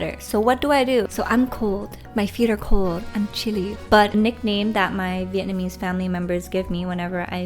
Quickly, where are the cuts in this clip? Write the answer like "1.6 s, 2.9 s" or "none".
1.1 s, 4.1 s